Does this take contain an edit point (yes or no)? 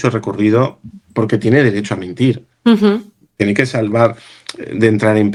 no